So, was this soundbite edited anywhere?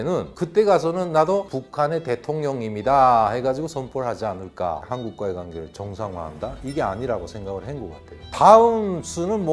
yes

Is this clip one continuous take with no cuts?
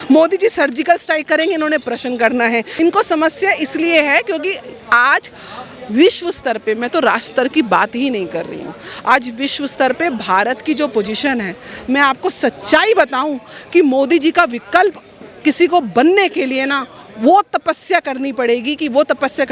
no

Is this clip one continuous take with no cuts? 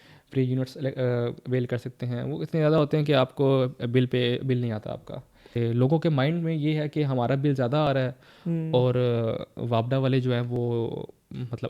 no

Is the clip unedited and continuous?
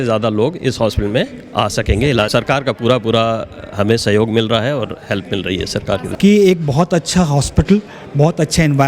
no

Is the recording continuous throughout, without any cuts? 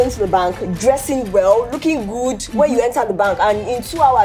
yes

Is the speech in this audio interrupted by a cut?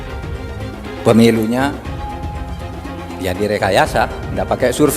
yes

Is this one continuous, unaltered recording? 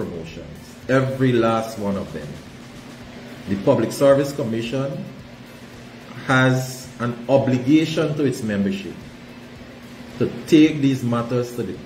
yes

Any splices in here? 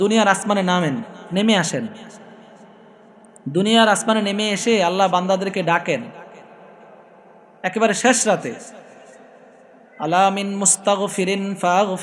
no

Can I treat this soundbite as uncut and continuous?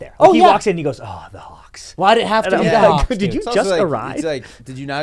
yes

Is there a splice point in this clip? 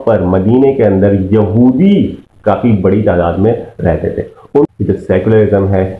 yes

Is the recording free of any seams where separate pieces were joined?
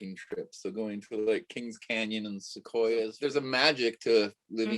no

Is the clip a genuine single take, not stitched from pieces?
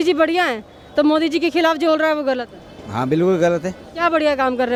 yes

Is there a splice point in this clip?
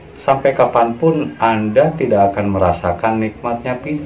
no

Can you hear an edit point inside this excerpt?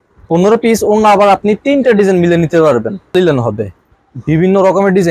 yes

